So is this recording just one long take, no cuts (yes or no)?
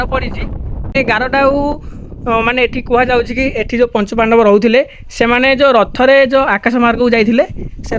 no